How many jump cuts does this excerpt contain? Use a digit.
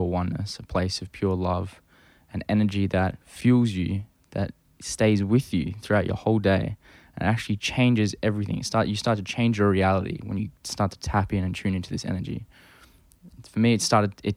1